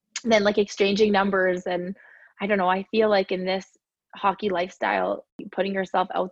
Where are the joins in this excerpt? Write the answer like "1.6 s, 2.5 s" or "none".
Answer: 5.4 s